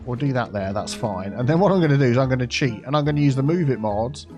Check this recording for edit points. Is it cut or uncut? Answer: uncut